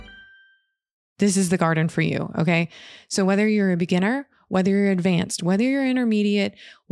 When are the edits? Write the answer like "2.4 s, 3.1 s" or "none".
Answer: 1.1 s